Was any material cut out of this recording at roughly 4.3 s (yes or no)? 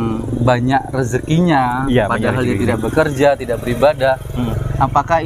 no